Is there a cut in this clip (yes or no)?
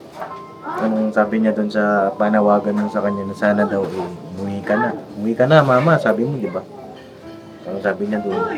no